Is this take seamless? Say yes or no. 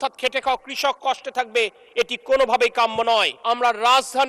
no